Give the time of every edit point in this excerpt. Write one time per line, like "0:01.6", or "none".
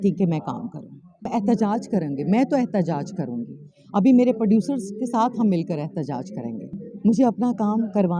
0:01.3
0:06.7